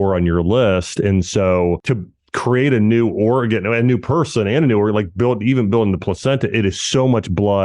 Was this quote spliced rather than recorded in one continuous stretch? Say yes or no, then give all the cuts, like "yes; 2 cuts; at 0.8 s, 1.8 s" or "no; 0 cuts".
yes; 1 cut; at 1.8 s